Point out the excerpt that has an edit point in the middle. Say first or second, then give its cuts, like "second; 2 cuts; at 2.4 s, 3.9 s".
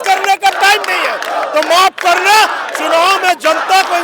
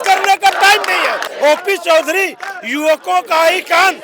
second; 1 cut; at 1.3 s